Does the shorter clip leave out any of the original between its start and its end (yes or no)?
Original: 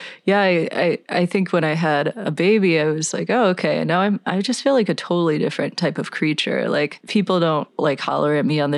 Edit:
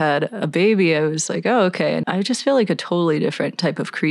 yes